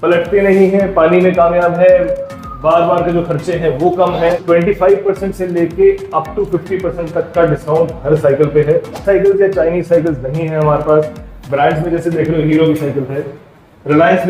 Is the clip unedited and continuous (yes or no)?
no